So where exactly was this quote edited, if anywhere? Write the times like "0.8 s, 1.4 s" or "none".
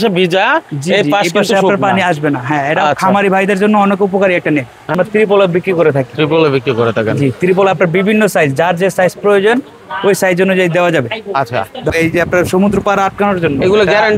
4.9 s, 11.8 s